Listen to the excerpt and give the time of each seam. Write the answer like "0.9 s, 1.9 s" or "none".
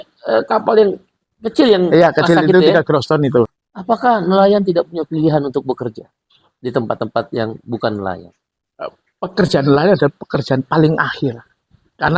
3.5 s